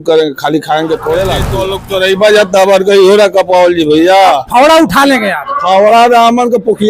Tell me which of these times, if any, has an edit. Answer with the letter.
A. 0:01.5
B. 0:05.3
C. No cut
A